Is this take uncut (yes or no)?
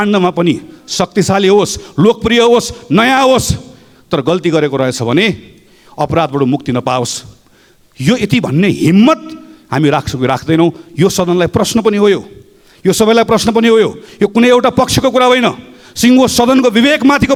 yes